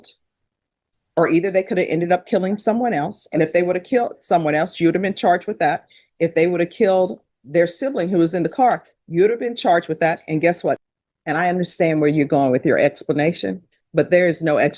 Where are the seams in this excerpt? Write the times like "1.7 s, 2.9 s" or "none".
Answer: 10.8 s